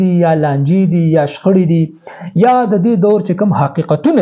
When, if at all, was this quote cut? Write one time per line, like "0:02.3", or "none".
none

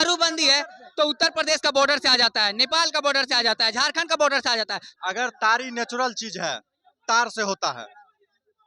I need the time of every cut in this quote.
0:04.9

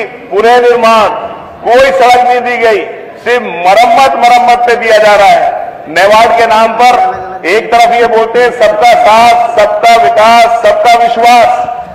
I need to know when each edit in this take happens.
none

